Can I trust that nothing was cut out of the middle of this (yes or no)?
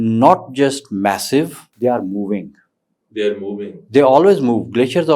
no